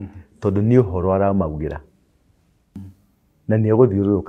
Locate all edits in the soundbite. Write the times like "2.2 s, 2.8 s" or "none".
2.8 s